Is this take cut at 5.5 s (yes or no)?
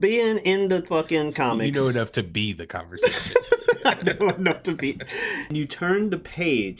yes